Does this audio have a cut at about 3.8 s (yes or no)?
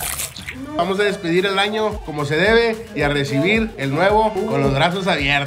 yes